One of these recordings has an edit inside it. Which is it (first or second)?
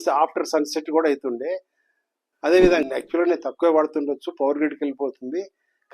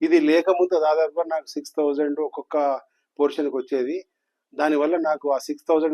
first